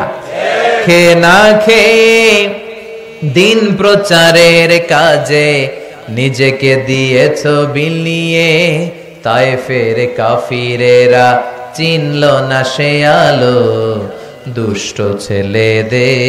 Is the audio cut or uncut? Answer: uncut